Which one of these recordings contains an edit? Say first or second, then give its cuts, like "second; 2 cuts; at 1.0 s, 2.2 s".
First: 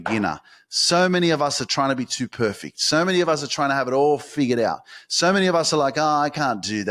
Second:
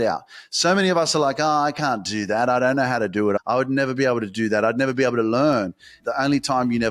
second; 2 cuts; at 3.4 s, 6.0 s